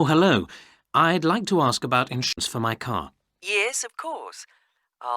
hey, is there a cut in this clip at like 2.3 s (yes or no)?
yes